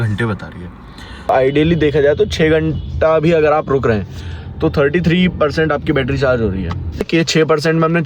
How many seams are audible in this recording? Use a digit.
2